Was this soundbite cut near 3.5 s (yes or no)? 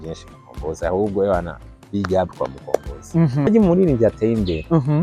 yes